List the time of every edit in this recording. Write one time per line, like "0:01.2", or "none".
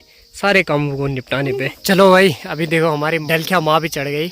0:01.7
0:03.2

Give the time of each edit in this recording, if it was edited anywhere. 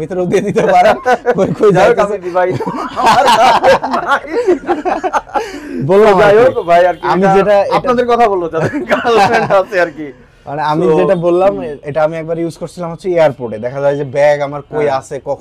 none

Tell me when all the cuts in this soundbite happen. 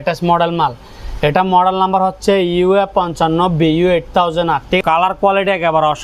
0:04.8

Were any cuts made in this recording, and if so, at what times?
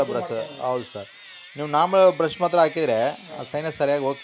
none

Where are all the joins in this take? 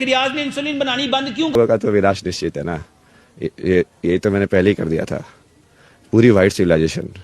0:01.5

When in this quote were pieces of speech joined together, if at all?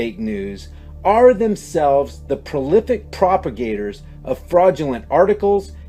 none

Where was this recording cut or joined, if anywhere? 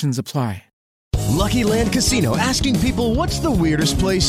0:01.1

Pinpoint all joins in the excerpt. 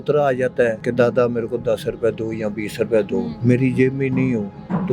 0:00.8
0:03.3

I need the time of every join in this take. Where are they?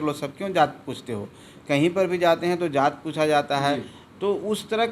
none

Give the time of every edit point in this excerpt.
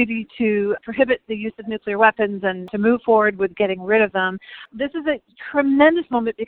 0:02.7
0:04.6

